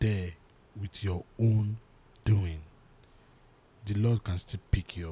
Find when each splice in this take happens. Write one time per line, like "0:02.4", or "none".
none

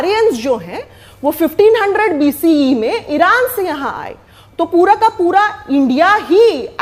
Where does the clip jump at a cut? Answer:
none

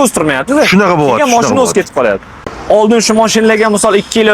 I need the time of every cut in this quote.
0:02.5

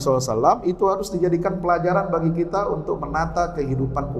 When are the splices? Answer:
none

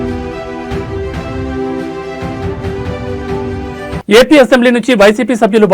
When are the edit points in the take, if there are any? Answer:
0:04.0

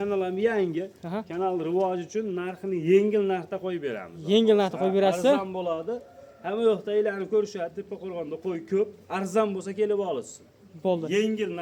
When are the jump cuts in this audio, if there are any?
none

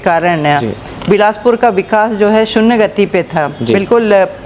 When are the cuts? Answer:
none

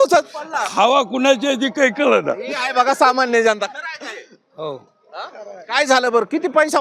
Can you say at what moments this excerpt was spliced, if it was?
none

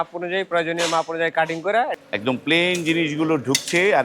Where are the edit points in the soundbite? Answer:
0:02.0

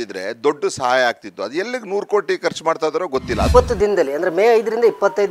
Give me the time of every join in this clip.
0:03.5

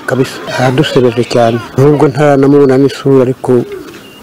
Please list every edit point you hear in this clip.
0:01.7

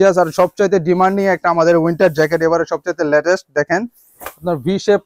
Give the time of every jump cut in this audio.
none

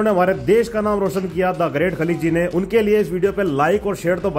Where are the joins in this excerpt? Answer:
none

